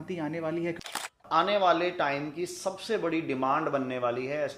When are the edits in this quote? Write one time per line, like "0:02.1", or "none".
0:00.9